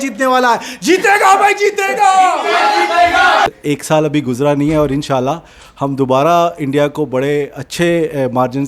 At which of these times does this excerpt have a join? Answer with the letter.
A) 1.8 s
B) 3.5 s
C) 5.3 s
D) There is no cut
B